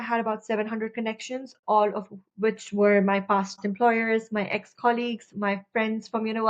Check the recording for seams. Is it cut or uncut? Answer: uncut